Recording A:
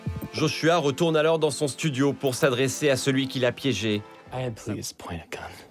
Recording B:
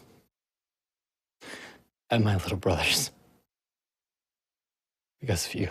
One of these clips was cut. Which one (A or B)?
A